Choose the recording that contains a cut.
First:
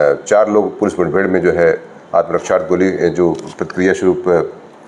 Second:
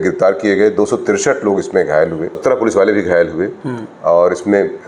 second; 1 cut; at 2.4 s

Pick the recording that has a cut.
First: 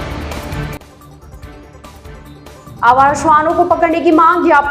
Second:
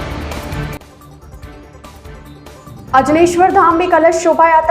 second; 1 cut; at 2.4 s

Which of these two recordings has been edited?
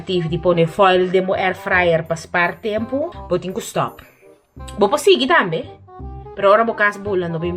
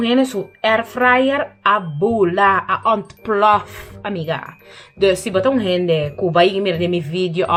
first; 1 cut; at 3.2 s

